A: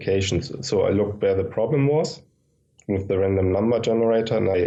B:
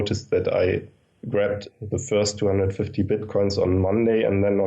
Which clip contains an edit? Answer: B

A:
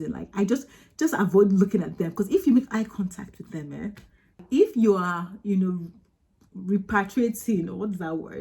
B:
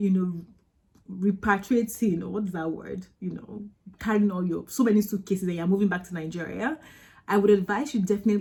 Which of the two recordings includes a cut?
A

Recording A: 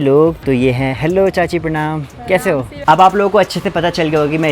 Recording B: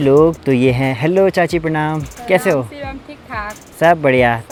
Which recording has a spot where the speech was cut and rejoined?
A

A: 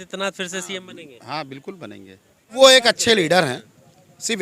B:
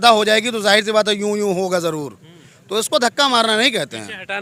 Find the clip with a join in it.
A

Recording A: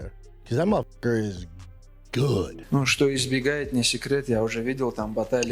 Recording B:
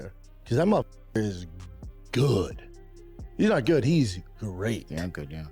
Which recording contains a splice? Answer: A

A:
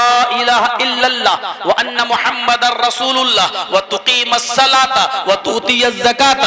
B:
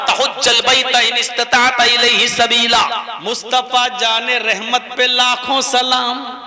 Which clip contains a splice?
B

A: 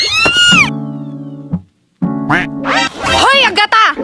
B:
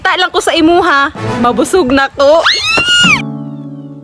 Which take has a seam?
A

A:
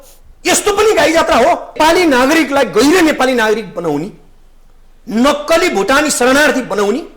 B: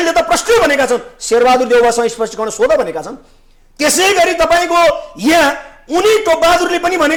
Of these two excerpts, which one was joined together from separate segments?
A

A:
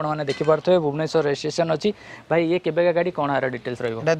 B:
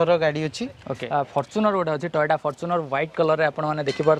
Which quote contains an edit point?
B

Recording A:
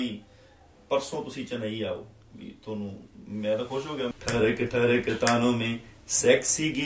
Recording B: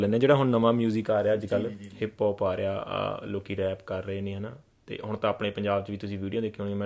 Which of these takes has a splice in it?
A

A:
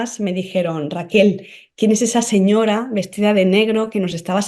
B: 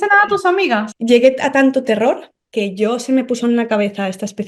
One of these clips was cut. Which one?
B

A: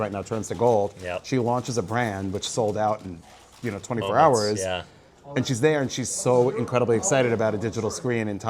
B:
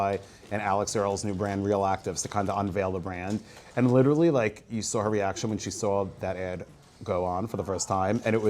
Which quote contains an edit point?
B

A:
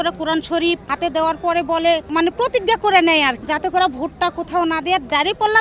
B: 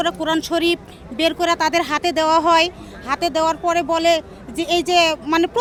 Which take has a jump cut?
A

